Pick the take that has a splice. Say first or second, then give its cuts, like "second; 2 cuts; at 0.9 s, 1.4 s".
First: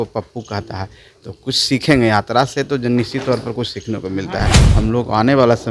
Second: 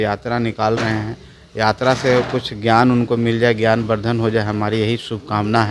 first; 1 cut; at 4.6 s